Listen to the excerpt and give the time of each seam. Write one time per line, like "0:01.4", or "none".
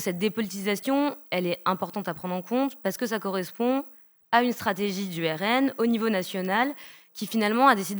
none